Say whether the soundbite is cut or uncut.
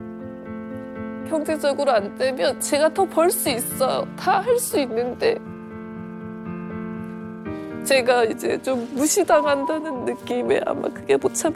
uncut